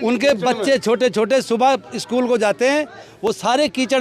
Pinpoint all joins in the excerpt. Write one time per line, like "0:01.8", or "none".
none